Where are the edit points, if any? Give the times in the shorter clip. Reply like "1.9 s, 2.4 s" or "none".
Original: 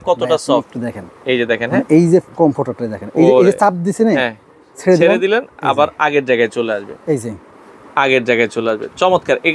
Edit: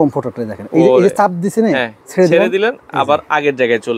2.0 s

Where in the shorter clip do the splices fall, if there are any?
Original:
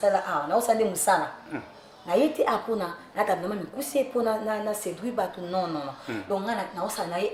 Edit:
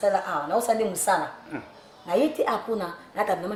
none

